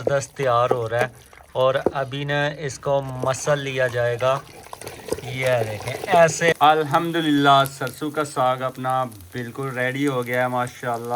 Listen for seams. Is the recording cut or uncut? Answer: cut